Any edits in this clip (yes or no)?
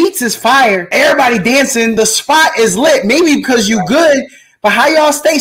yes